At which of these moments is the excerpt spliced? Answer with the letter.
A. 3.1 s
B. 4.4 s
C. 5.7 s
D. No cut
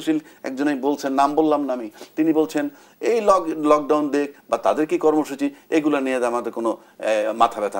D